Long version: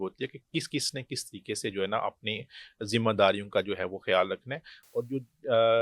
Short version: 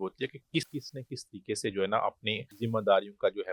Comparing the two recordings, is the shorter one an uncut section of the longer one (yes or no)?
no